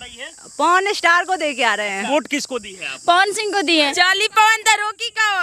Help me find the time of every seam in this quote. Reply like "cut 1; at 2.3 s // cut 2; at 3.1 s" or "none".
cut 1; at 2.0 s // cut 2; at 3.9 s